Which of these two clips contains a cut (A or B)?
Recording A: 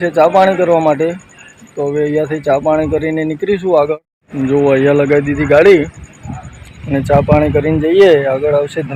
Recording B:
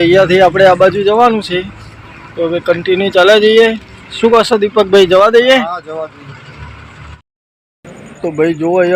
B